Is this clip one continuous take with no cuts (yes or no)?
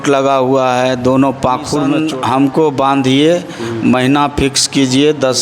no